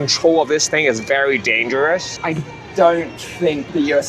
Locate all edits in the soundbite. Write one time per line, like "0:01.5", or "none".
none